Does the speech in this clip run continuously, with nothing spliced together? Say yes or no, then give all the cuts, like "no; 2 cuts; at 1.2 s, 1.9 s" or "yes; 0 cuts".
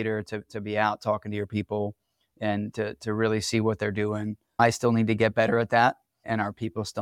yes; 0 cuts